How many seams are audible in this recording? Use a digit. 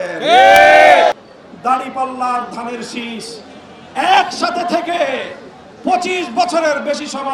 1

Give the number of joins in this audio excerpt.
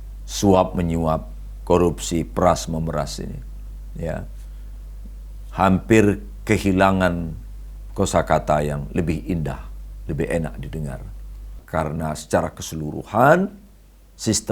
1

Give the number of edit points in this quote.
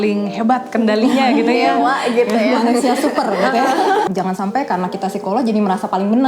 1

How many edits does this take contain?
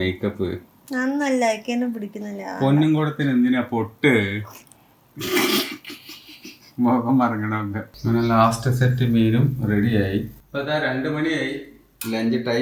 1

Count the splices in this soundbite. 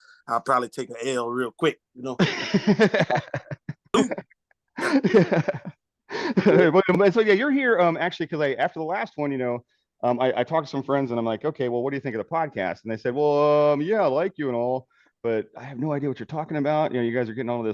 2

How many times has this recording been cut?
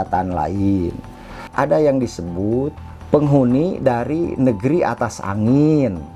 1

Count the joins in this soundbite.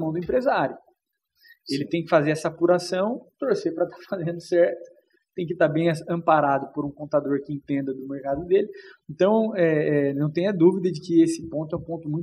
0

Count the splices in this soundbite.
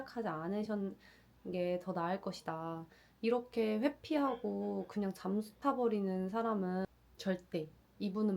1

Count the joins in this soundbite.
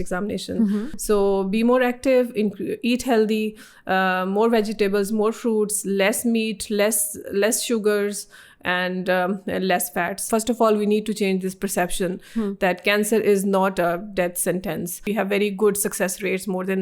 3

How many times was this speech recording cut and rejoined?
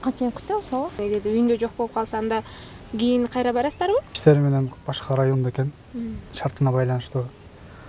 2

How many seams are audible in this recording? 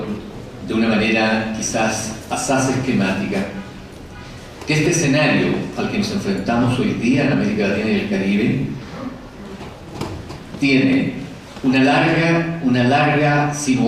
1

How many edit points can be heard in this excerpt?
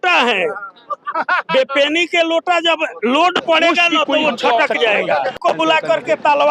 1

